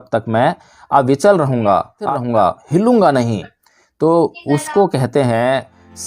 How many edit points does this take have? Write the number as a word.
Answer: one